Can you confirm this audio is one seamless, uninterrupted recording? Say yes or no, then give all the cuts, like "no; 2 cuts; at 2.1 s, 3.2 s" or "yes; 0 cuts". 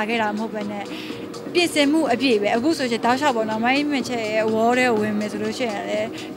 yes; 0 cuts